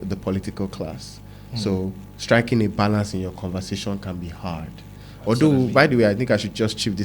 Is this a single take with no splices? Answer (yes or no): yes